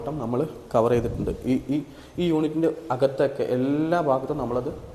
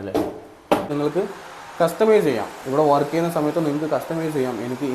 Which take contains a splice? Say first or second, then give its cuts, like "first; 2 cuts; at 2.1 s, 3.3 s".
second; 1 cut; at 0.9 s